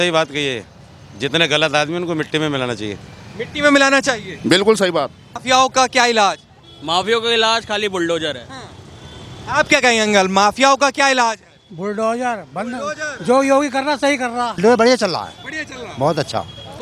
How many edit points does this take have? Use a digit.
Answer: 2